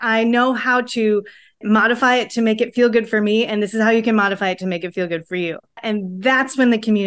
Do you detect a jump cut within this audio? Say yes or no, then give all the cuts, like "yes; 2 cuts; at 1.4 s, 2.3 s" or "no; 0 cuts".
yes; 1 cut; at 5.8 s